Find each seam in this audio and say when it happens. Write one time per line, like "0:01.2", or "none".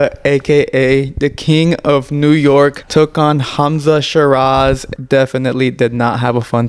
0:02.8
0:04.9